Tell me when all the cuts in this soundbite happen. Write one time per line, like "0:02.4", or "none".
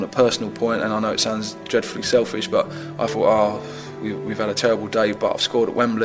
none